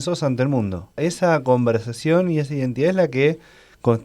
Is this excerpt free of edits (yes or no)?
no